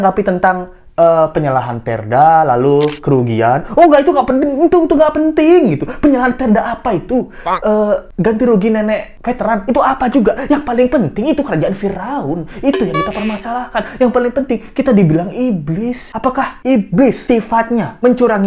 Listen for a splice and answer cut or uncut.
uncut